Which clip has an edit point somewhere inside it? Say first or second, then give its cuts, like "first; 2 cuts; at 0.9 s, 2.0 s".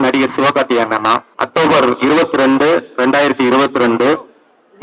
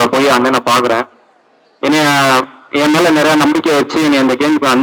first; 1 cut; at 1.3 s